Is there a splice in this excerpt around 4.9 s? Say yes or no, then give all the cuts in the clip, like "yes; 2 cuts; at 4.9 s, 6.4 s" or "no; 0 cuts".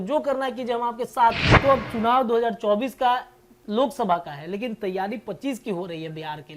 no; 1 cut; at 1.5 s